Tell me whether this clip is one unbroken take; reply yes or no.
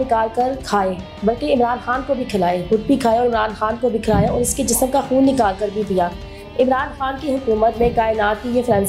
yes